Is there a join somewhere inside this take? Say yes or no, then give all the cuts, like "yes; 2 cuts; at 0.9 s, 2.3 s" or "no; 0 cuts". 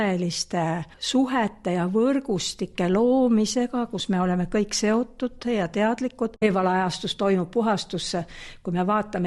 yes; 2 cuts; at 0.9 s, 6.4 s